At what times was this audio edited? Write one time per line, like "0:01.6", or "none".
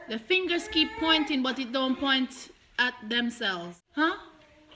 0:03.8

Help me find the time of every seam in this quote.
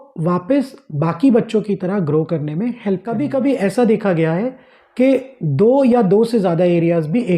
0:03.2

